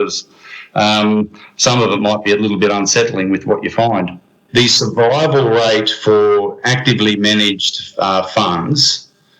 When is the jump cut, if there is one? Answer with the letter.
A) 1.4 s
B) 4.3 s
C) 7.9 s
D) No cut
B